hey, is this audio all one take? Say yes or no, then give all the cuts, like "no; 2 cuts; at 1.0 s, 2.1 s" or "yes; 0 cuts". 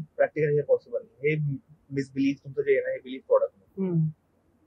yes; 0 cuts